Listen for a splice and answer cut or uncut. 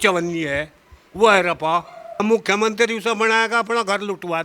cut